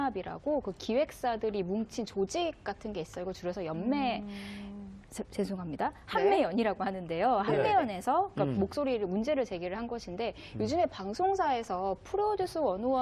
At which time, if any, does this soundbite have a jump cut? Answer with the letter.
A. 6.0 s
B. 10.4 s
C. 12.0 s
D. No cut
C